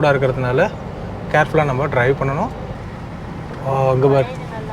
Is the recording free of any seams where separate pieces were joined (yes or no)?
no